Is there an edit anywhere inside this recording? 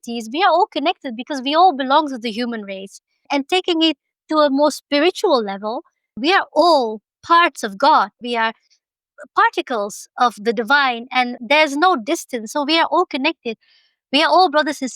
yes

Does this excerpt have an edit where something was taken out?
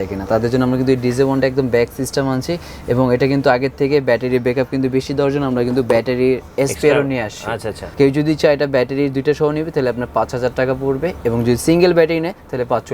yes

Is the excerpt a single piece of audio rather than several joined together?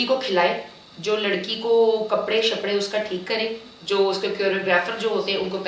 yes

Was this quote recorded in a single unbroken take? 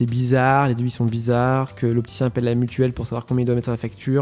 yes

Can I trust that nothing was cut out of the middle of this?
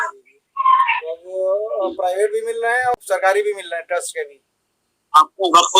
no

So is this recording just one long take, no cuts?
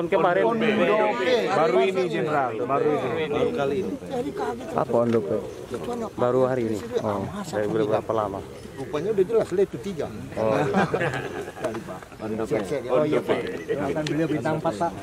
yes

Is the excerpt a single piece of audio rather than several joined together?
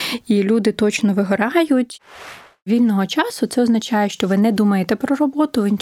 no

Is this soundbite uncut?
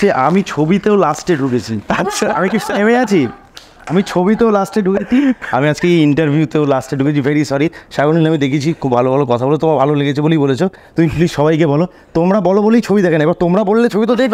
yes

